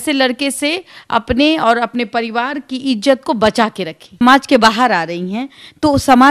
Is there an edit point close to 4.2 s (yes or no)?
yes